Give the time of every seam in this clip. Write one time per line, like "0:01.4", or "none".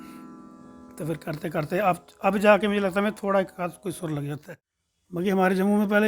0:04.4